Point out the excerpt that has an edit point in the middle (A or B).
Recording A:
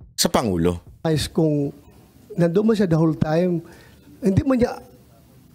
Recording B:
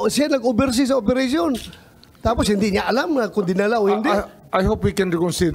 A